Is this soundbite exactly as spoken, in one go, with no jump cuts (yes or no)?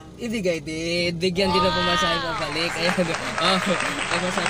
yes